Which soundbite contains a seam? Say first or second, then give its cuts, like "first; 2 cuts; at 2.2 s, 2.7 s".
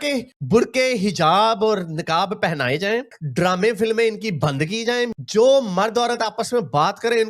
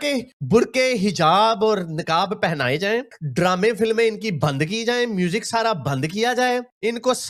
first; 1 cut; at 5.1 s